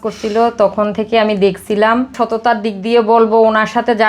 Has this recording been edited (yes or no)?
yes